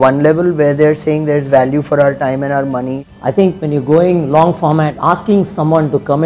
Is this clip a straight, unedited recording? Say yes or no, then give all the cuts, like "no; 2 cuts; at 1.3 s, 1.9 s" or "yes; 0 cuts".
no; 2 cuts; at 3.1 s, 4.9 s